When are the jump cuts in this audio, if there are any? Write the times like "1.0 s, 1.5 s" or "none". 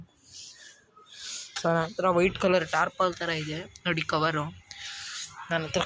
1.5 s